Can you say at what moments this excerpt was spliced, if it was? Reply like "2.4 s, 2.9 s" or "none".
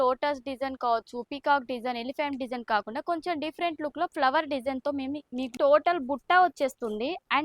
5.5 s